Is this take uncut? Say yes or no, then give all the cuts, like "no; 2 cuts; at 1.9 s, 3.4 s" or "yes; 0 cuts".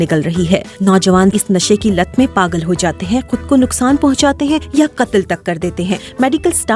no; 1 cut; at 1.4 s